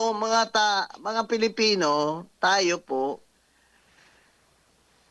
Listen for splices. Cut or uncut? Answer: uncut